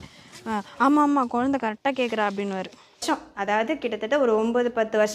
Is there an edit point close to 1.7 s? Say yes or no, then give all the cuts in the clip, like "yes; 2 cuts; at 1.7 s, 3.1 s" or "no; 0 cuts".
no; 1 cut; at 3.0 s